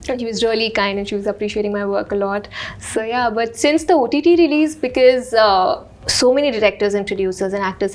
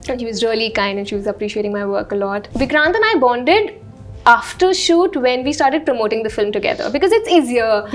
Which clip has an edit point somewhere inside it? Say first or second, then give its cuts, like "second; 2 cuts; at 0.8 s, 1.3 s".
second; 1 cut; at 2.5 s